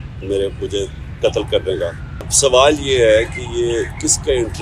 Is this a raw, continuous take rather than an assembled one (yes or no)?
no